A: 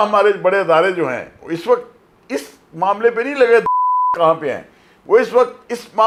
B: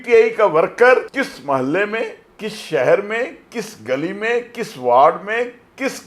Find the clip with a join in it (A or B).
B